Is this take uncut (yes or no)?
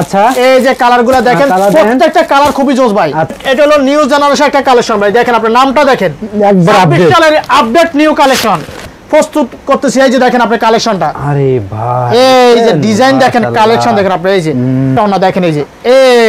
no